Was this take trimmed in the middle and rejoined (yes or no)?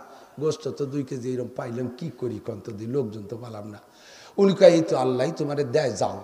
no